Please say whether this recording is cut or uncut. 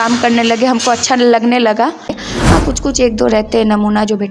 cut